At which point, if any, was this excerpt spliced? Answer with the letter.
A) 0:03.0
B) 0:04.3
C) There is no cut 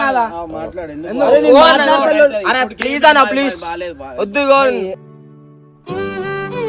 C